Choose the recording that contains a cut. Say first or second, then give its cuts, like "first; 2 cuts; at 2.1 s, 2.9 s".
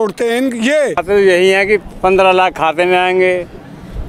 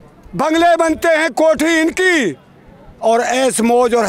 first; 1 cut; at 1.0 s